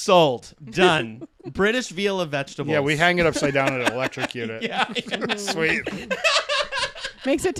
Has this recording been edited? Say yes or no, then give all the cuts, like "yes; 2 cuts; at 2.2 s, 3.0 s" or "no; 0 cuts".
no; 0 cuts